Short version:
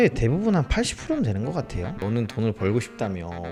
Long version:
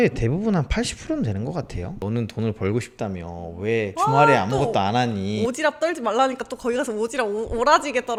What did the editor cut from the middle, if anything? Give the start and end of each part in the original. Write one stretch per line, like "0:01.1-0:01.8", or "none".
none